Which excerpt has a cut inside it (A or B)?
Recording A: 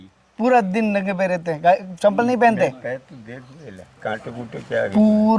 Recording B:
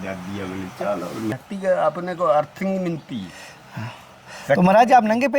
B